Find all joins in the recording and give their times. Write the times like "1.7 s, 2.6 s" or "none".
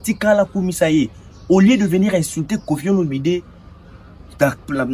none